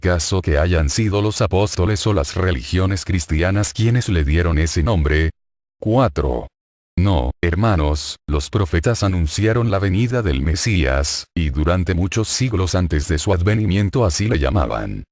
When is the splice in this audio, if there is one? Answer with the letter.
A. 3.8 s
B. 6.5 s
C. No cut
A